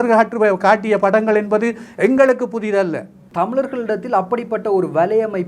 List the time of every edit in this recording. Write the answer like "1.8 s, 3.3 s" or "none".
3.2 s